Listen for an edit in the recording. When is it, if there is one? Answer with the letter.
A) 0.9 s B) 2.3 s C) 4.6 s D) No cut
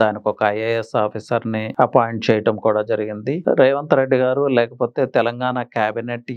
D